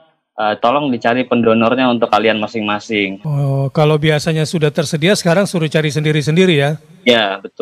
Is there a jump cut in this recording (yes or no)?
yes